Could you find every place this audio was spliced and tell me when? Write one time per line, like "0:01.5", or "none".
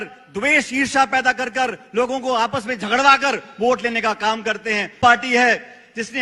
0:05.0